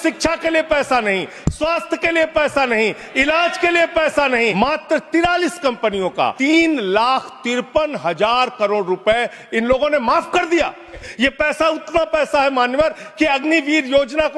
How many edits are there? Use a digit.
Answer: 3